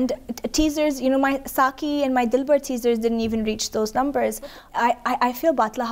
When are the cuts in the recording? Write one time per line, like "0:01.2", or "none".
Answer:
0:04.6